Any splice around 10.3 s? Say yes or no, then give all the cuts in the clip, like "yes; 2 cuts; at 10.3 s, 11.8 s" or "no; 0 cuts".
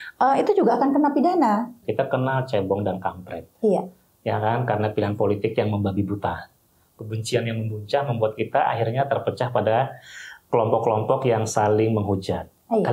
no; 1 cut; at 1.8 s